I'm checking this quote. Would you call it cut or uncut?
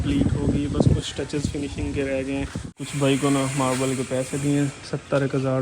cut